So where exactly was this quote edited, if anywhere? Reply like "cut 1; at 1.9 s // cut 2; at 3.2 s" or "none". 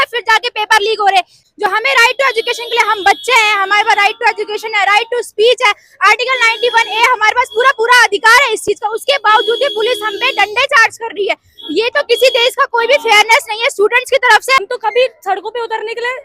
cut 1; at 1.4 s // cut 2; at 14.6 s